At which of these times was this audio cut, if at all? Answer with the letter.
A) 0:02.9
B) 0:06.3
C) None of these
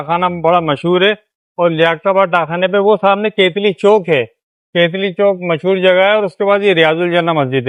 C